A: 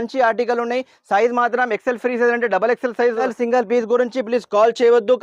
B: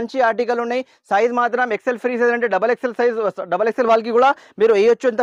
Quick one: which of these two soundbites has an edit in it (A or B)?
A